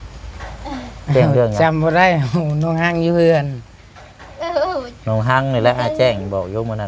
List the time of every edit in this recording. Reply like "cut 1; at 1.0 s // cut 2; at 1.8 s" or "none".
none